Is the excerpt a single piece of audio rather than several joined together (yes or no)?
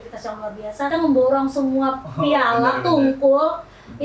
no